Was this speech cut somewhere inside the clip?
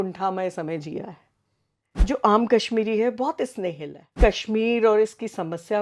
yes; 2 cuts; at 2.1 s, 4.2 s

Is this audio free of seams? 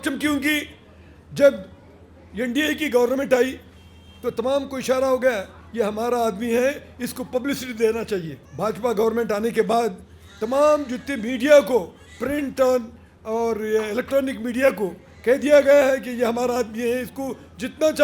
no; 1 cut; at 8.4 s

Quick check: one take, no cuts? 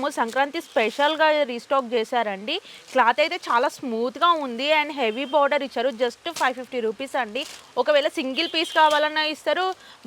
yes; 0 cuts

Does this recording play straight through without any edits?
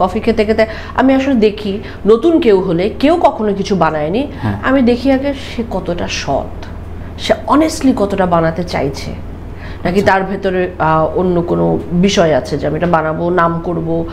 yes; 0 cuts

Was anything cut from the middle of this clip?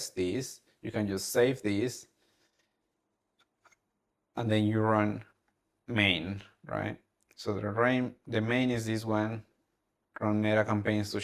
no; 0 cuts

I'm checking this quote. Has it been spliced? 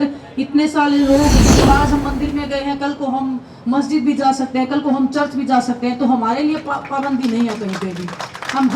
yes; 1 cut; at 1.5 s

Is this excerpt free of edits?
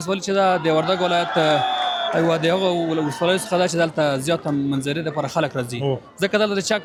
yes; 0 cuts

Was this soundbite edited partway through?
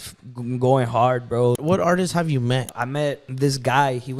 yes; 2 cuts; at 1.6 s, 2.7 s

